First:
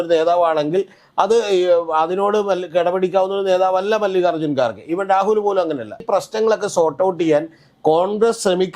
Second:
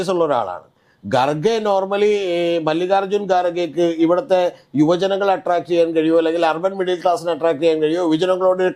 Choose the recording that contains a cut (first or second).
first